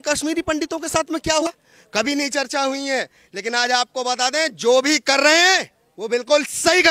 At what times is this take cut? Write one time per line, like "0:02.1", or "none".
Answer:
0:01.5